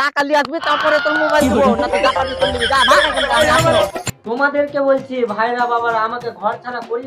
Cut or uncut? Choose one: cut